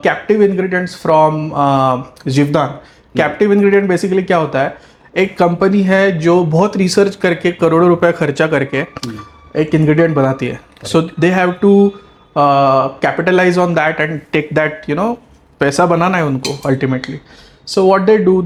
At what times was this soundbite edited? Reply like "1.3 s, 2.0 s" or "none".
none